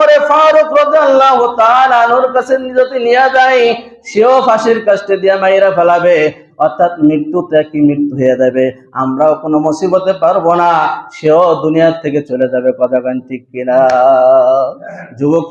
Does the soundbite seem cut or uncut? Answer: uncut